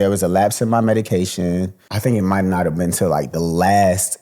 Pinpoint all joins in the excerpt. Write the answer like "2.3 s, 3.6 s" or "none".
1.8 s

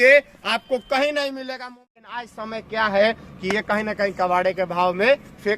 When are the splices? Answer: 1.7 s

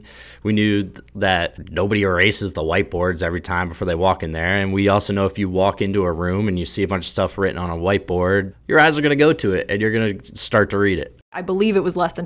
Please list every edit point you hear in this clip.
1.6 s, 8.5 s, 11.4 s

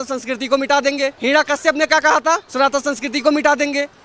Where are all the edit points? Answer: 1.2 s, 2.5 s

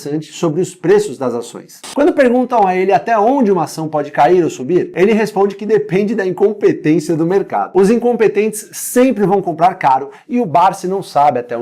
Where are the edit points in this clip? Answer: none

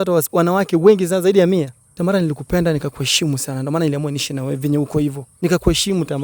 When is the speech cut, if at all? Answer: 1.8 s, 5.3 s

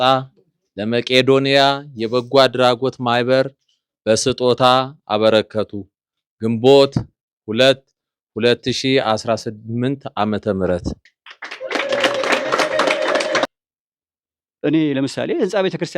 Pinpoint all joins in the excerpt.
13.5 s

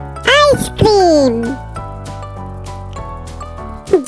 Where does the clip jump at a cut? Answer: none

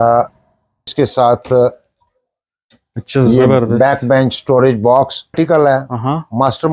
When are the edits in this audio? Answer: 0.9 s, 5.3 s

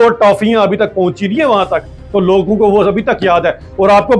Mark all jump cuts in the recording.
none

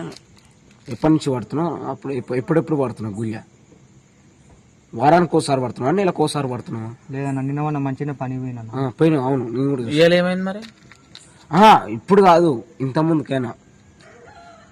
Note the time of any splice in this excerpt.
none

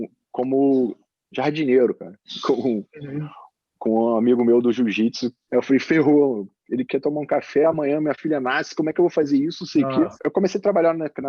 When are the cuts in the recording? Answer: 5.3 s, 10.2 s

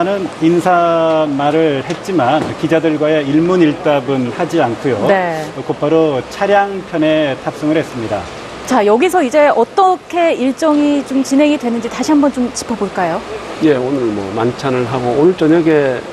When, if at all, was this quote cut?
6.5 s

